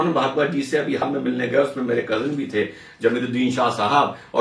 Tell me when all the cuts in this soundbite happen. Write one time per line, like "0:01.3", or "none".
0:01.0